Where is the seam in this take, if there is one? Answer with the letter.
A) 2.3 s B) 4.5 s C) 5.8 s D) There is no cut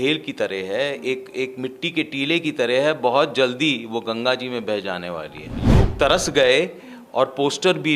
C